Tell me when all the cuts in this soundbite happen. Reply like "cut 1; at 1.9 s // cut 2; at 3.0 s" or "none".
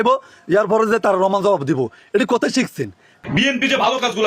cut 1; at 3.1 s

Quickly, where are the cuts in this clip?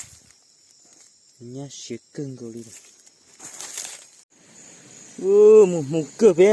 cut 1; at 4.2 s

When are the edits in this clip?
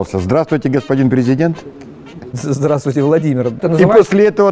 cut 1; at 3.6 s

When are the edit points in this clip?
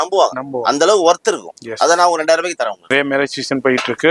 cut 1; at 2.9 s

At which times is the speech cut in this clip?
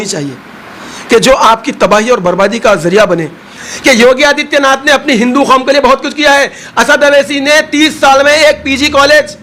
cut 1; at 3.6 s

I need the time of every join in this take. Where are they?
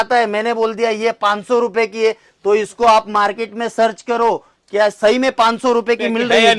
none

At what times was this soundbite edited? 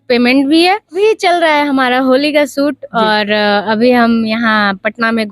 cut 1; at 1.0 s

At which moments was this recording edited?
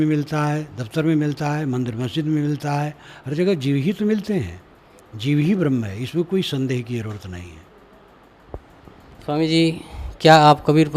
cut 1; at 8.3 s

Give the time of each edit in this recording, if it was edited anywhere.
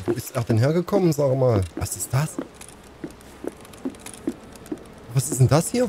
cut 1; at 1.7 s

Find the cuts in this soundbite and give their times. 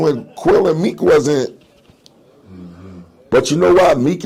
none

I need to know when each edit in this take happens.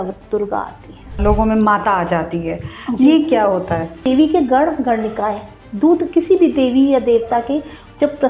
cut 1; at 1.2 s // cut 2; at 4.1 s

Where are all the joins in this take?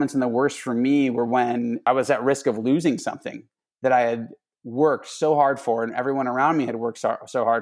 cut 1; at 1.8 s

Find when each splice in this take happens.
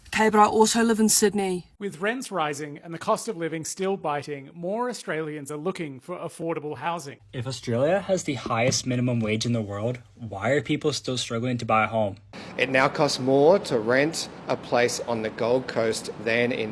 cut 1; at 1.7 s // cut 2; at 7.1 s // cut 3; at 12.2 s

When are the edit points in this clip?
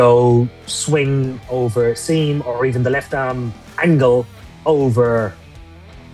none

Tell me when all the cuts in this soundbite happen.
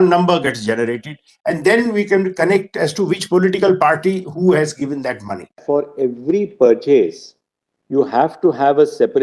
cut 1; at 5.6 s

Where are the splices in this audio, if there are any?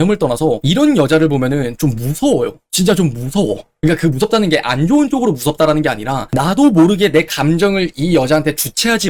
none

